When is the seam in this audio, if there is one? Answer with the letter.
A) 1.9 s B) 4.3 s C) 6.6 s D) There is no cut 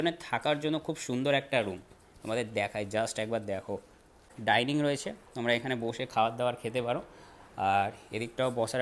B